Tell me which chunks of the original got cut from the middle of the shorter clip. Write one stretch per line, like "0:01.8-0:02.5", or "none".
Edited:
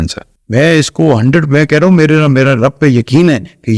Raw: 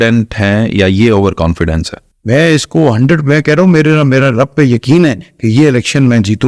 none

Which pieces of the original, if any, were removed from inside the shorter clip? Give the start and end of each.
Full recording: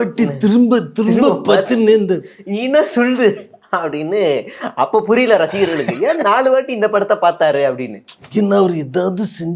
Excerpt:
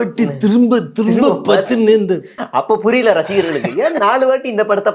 0:02.3-0:04.6

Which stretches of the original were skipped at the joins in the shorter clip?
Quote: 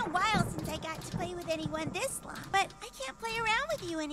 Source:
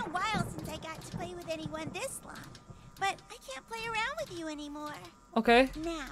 0:02.3-0:02.8

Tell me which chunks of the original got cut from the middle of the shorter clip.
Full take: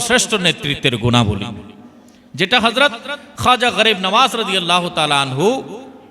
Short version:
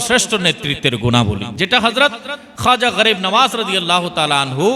0:01.5-0:02.3

